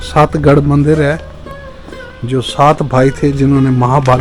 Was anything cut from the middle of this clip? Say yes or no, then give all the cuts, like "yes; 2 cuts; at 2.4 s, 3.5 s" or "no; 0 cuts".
no; 0 cuts